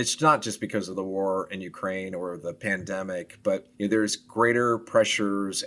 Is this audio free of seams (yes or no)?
no